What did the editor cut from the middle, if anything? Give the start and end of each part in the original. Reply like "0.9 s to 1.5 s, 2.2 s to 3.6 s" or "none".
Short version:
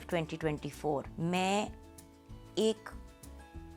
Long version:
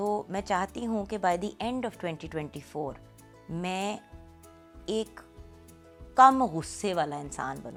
3.0 s to 3.4 s